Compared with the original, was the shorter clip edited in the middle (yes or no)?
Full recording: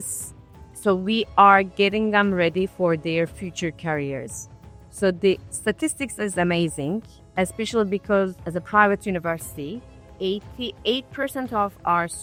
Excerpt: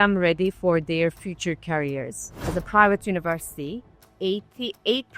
yes